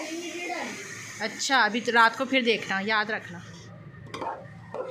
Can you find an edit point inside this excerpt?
yes; 1 cut; at 3.3 s

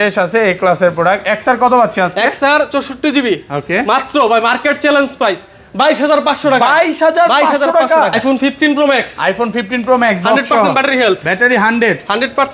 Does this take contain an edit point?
yes; 1 cut; at 8.1 s

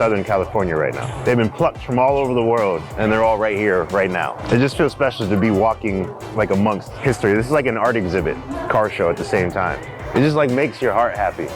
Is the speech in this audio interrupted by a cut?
yes; 6 cuts; at 1.1 s, 2.9 s, 4.4 s, 6.9 s, 8.5 s, 9.9 s

